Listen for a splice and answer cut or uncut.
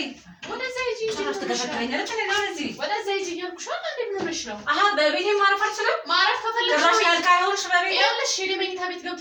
uncut